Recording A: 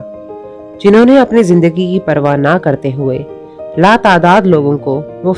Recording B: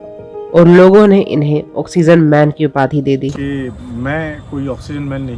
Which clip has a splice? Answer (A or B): B